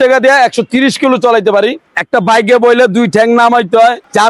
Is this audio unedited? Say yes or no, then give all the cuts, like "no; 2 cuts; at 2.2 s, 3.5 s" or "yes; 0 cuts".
yes; 0 cuts